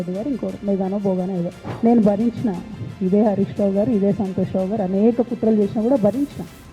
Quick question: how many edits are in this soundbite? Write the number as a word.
one